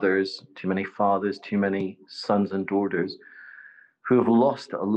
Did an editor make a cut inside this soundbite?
no; 0 cuts

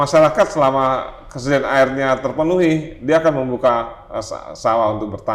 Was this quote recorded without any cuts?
yes; 0 cuts

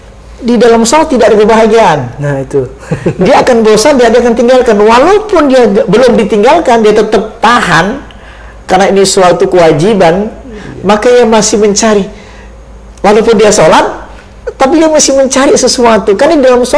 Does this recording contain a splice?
no; 0 cuts

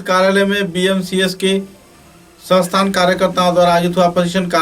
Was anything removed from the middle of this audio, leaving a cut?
no; 0 cuts

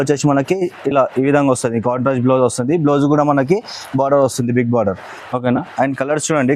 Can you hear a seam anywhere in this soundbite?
no; 0 cuts

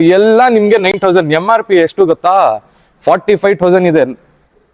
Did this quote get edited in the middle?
no; 0 cuts

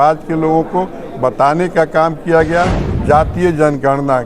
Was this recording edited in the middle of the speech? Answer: yes; 1 cut; at 2.8 s

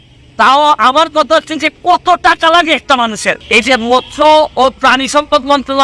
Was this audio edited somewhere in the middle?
yes; 1 cut; at 3.4 s

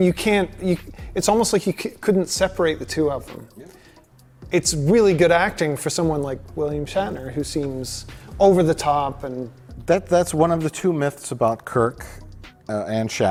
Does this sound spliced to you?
no; 0 cuts

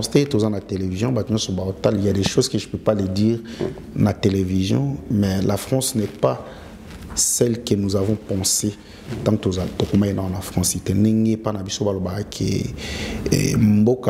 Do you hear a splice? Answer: no; 0 cuts

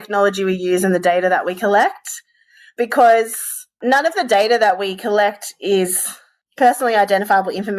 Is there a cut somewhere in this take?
yes; 1 cut; at 6.3 s

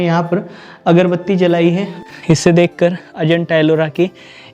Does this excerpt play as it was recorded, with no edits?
no; 1 cut; at 1.9 s

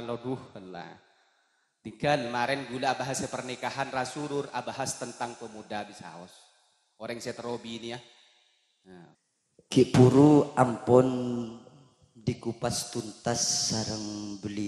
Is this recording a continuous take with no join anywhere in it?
no; 1 cut; at 9.2 s

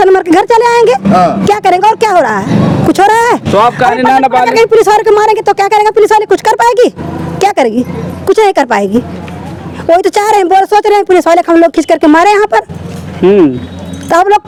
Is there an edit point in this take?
no; 0 cuts

